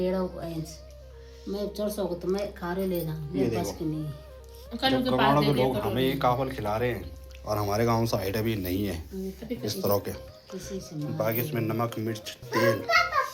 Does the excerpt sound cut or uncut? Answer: uncut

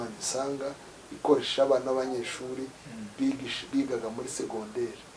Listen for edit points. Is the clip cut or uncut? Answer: uncut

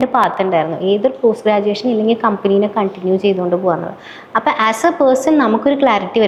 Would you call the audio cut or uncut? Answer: uncut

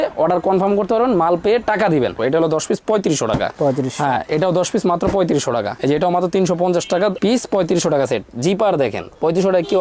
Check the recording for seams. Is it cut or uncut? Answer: cut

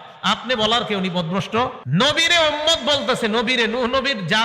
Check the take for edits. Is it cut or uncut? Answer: cut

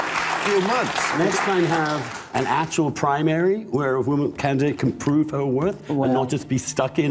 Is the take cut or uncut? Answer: cut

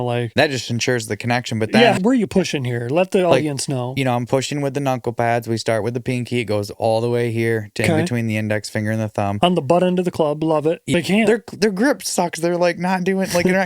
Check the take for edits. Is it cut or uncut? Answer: cut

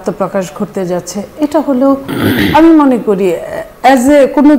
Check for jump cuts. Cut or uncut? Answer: uncut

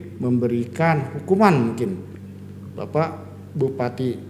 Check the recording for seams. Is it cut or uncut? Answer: cut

